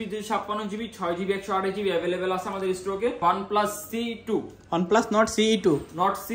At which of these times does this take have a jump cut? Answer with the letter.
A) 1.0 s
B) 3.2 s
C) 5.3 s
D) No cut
B